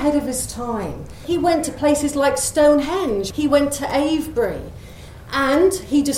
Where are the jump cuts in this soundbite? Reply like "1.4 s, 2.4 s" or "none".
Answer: 1.2 s, 3.3 s